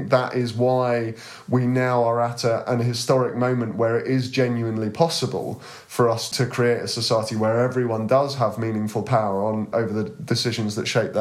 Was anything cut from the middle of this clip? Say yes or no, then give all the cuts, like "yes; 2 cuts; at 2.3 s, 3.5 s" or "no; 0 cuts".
yes; 2 cuts; at 6.3 s, 9.7 s